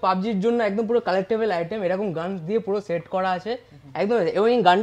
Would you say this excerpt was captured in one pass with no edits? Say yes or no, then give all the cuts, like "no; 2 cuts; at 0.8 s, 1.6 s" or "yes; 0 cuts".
yes; 0 cuts